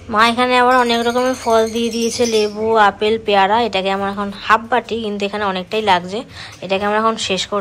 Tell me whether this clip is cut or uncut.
uncut